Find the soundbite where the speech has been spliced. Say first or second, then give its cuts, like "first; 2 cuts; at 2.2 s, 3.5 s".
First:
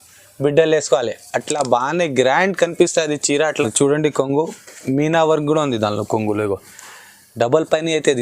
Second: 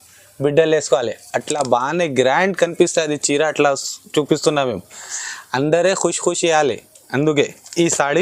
first; 1 cut; at 3.6 s